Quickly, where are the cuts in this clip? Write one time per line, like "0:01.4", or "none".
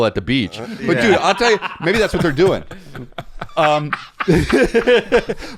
none